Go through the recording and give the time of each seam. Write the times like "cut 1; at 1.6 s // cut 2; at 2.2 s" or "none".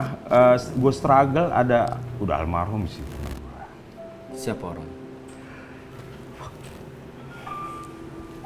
none